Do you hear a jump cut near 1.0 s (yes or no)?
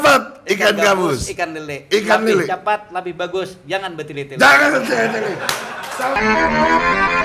no